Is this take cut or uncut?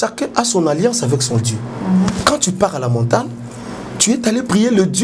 uncut